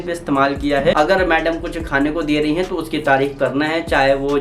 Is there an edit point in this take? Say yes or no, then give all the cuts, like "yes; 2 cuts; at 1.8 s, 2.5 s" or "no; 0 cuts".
yes; 1 cut; at 0.9 s